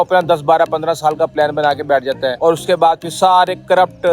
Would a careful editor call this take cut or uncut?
cut